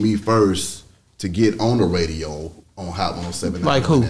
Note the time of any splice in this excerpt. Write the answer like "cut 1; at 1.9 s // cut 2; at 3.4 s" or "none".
none